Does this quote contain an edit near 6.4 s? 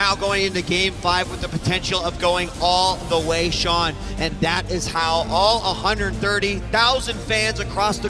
no; 1 cut; at 4.3 s

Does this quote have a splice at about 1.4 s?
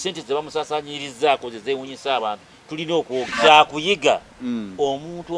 no; 1 cut; at 3.3 s

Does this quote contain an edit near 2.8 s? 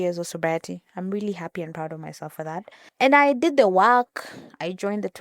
yes; 1 cut; at 2.8 s

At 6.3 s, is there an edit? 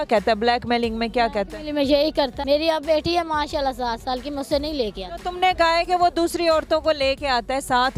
no; 1 cut; at 2.3 s

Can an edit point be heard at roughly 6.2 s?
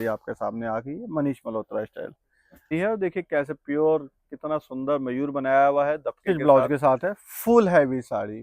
yes; 2 cuts; at 2.7 s, 6.2 s

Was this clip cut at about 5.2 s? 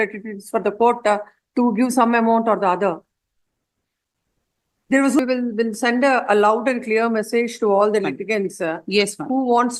yes; 1 cut; at 5.2 s

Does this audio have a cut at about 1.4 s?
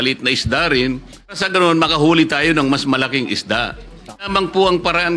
yes; 2 cuts; at 1.4 s, 4.2 s

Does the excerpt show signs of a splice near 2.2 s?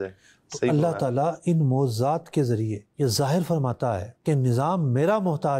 no; 0 cuts

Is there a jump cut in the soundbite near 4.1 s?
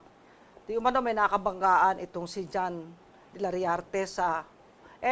yes; 1 cut; at 4.1 s

